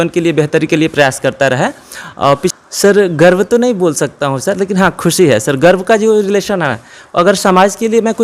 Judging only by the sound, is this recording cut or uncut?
cut